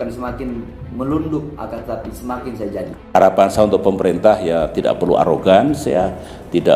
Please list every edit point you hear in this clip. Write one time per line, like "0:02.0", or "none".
0:03.1